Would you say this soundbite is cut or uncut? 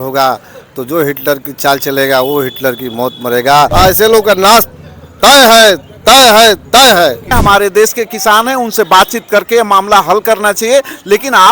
cut